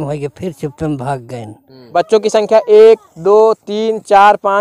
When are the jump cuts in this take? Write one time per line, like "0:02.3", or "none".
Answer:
0:01.8